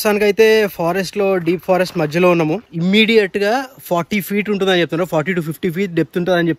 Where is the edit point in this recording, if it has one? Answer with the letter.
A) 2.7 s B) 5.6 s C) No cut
A